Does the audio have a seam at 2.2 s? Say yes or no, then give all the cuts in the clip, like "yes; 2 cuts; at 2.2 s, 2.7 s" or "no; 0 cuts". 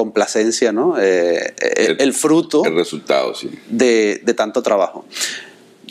no; 0 cuts